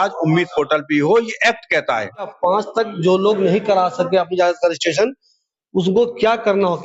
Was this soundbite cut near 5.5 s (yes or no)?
no